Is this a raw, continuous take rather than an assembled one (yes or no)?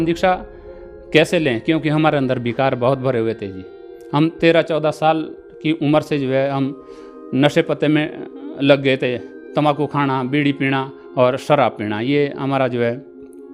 yes